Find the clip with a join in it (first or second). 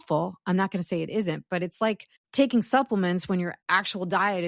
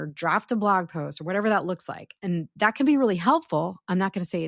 first